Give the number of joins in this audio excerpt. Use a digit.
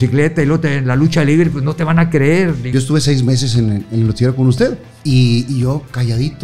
2